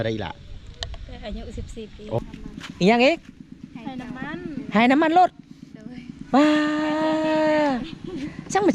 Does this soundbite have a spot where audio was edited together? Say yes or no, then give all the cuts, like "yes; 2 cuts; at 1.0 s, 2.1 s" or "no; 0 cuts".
yes; 1 cut; at 2.2 s